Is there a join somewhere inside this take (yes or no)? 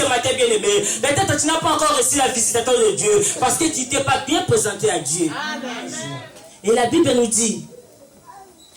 yes